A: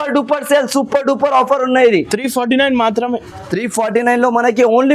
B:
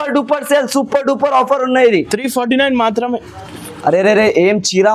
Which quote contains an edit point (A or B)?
B